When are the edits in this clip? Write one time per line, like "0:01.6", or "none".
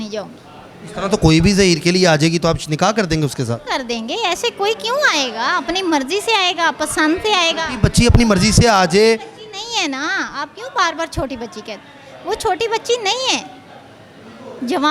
none